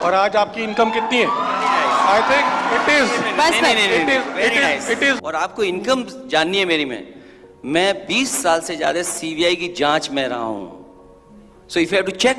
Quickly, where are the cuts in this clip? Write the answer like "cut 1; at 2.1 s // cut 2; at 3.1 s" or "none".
cut 1; at 5.2 s